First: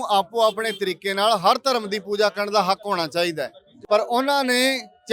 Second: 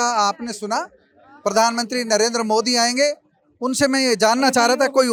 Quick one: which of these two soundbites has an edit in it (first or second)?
first